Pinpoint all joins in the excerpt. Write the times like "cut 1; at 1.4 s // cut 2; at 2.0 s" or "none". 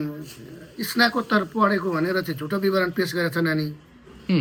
none

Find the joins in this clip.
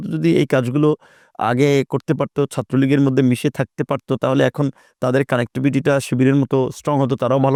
none

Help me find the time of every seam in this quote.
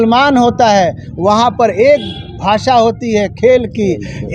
none

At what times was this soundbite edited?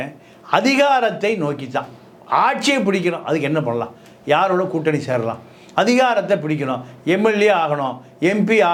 none

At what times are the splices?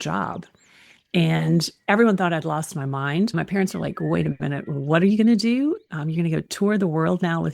cut 1; at 3.4 s

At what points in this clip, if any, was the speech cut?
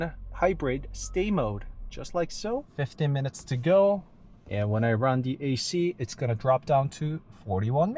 cut 1; at 2.7 s

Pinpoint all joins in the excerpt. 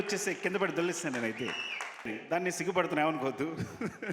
cut 1; at 2.2 s

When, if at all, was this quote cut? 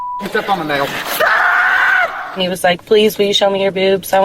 cut 1; at 2.2 s

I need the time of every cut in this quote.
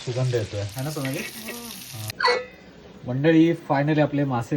cut 1; at 2.1 s

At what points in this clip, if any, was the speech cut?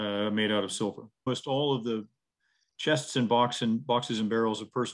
cut 1; at 1.3 s

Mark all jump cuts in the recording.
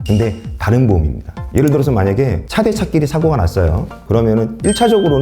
cut 1; at 1.3 s

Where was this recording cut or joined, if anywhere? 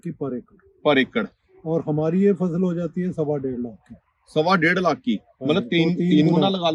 none

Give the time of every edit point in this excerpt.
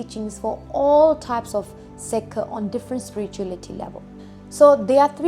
none

